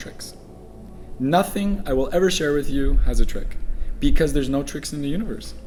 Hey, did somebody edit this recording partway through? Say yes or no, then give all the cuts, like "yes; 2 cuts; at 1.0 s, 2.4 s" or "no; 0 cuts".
no; 0 cuts